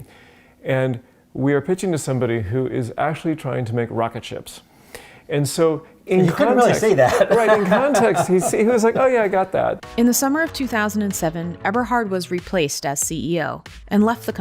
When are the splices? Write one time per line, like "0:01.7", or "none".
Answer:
0:09.8